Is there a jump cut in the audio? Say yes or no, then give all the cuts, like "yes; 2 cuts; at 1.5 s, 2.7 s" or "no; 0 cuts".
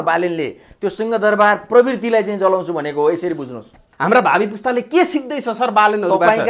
yes; 1 cut; at 3.9 s